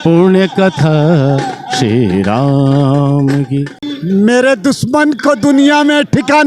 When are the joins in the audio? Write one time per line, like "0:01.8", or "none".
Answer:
0:03.9